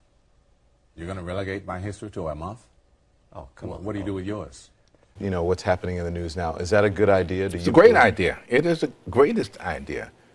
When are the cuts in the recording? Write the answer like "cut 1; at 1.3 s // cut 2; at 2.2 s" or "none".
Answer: cut 1; at 5.1 s